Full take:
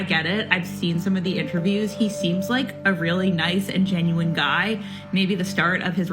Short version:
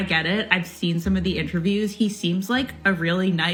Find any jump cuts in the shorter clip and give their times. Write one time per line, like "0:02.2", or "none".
none